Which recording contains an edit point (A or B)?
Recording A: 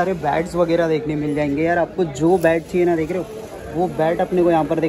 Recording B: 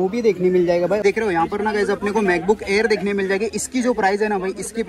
B